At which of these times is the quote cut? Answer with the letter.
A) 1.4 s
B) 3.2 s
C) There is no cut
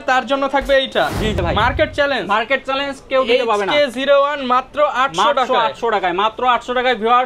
A